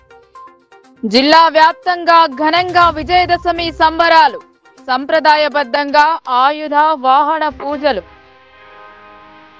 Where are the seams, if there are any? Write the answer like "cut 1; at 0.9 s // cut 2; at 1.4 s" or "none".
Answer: none